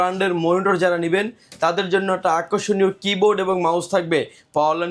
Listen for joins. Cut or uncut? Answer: uncut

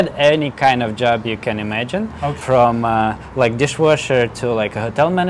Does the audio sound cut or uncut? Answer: uncut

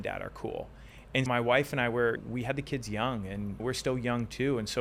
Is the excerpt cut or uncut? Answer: uncut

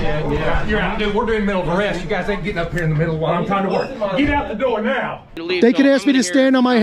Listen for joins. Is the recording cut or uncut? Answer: cut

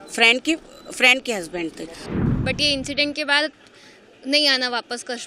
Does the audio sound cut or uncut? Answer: cut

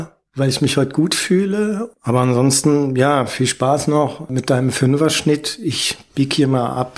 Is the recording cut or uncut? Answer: cut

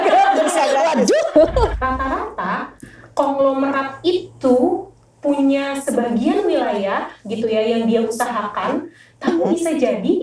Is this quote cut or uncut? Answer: cut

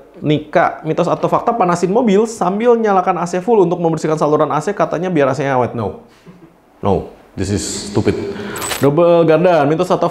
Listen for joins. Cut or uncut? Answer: cut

